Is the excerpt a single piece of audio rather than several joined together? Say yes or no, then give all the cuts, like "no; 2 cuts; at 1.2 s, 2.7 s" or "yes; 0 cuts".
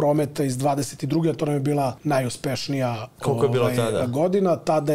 no; 1 cut; at 2.0 s